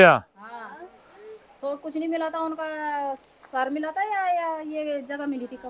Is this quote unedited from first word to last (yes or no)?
yes